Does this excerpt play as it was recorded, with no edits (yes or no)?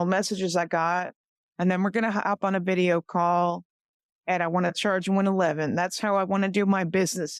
yes